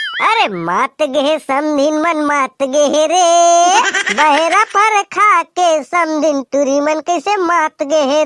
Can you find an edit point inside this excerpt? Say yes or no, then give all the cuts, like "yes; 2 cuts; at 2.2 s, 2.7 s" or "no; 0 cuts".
no; 0 cuts